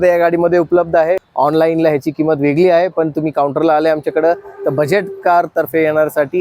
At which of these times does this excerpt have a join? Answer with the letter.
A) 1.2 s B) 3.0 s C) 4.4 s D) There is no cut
A